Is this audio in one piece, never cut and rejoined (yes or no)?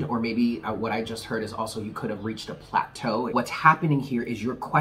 no